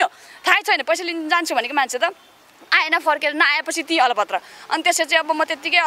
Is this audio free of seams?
yes; 0 cuts

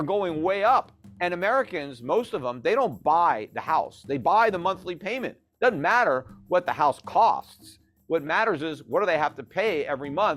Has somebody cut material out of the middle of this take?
yes; 1 cut; at 1.0 s

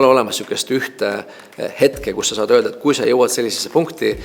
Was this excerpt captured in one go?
yes; 0 cuts

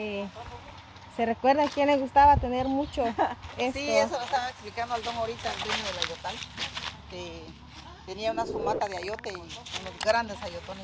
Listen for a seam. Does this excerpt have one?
no; 0 cuts

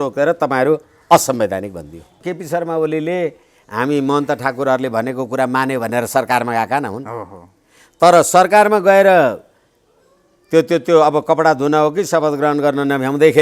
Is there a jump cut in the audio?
yes; 1 cut; at 2.2 s

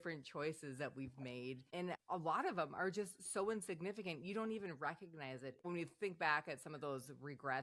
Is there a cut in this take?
yes; 2 cuts; at 1.7 s, 5.6 s

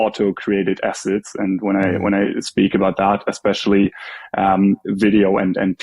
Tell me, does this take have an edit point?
no; 0 cuts

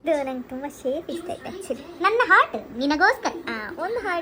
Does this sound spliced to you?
no; 0 cuts

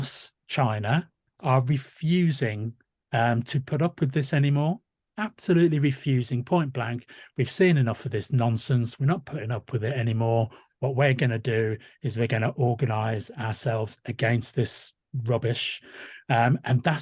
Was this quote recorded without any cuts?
no; 1 cut; at 1.3 s

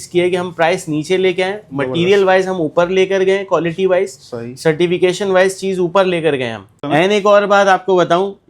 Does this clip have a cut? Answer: yes; 1 cut; at 6.7 s

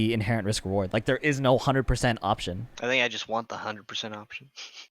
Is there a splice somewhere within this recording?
yes; 1 cut; at 2.7 s

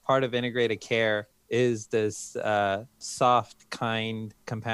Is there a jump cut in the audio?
yes; 2 cuts; at 1.3 s, 3.1 s

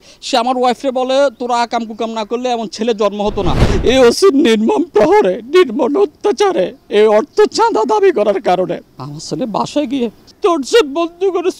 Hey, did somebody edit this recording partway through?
yes; 3 cuts; at 3.6 s, 9.0 s, 10.2 s

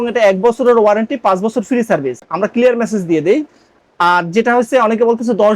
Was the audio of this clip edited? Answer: no; 0 cuts

